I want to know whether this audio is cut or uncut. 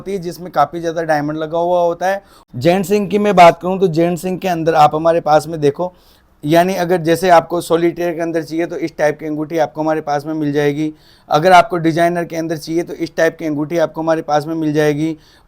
cut